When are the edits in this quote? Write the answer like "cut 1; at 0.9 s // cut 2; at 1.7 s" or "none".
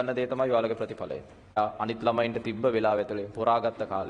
cut 1; at 1.5 s